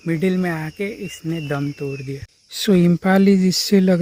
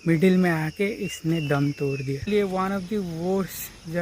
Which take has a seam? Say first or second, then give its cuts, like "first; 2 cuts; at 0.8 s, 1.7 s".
second; 1 cut; at 2.3 s